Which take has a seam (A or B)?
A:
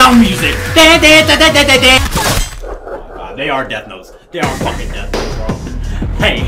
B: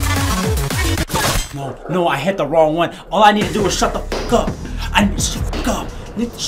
A